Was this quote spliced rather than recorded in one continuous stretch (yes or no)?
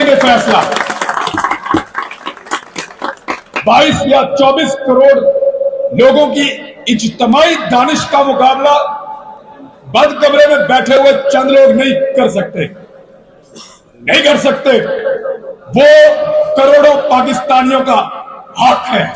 no